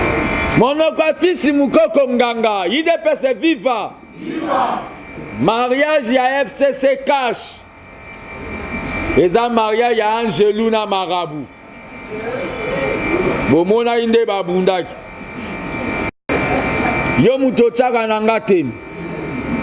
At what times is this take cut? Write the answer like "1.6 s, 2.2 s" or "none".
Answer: 16.2 s